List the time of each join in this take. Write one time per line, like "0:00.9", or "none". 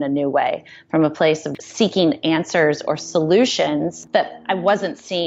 0:01.5
0:04.0